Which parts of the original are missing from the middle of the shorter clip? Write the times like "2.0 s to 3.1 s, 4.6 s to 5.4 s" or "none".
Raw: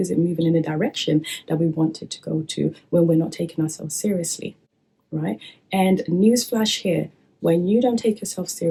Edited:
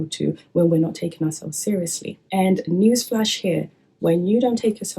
4.5 s to 5.5 s